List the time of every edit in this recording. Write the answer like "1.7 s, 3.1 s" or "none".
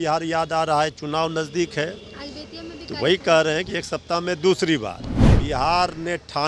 5.3 s